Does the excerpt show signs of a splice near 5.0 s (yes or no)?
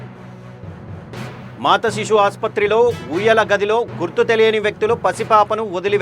no